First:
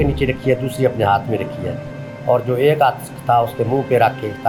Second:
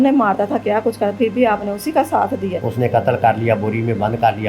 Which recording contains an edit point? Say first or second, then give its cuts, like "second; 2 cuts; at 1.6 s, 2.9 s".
second; 1 cut; at 2.6 s